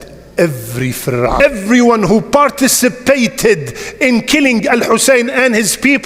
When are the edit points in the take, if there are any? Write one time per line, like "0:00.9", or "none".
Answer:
0:01.4